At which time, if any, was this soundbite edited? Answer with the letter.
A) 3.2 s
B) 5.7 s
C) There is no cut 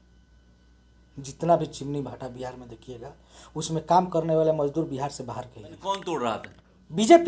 B